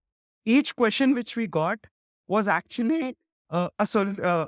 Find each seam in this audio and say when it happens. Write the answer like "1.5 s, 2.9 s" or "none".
none